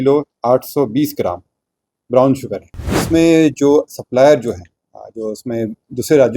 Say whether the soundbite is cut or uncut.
cut